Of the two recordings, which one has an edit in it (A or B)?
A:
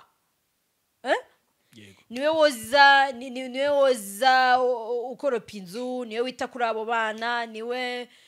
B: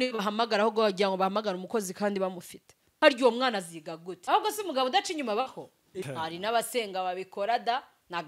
B